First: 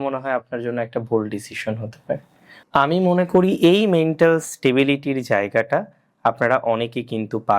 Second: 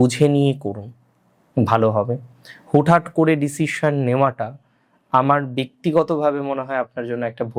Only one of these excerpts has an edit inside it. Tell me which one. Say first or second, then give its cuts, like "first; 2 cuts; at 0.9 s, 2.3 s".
first; 1 cut; at 2.5 s